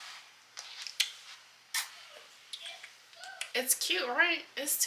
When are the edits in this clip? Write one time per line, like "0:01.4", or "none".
0:03.5

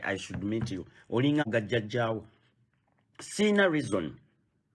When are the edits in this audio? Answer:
0:01.4

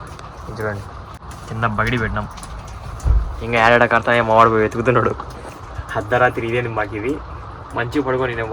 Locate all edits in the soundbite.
0:01.2

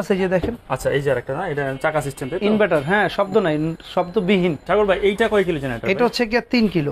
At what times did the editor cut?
0:04.6

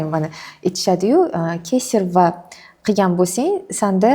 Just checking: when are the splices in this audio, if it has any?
none

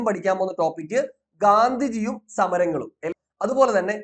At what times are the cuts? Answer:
0:03.1

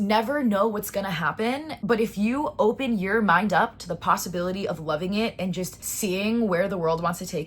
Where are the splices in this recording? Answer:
0:01.7
0:05.8

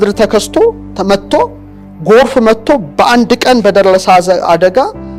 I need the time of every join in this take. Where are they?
none

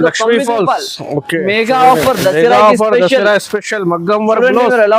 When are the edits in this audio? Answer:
0:01.3

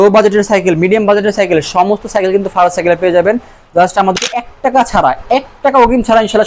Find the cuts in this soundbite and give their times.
0:04.2

